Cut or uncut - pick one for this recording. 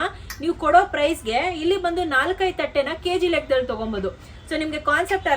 uncut